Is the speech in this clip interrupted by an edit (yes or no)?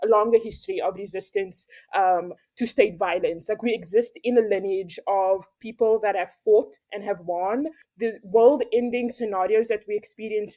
yes